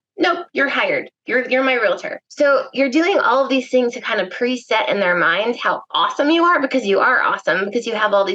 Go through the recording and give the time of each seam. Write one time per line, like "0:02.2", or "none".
0:02.2